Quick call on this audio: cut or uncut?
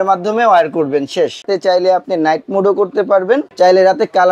cut